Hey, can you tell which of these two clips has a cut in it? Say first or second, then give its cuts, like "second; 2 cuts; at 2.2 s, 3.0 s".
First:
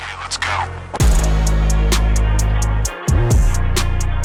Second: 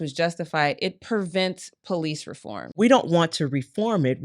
second; 1 cut; at 2.8 s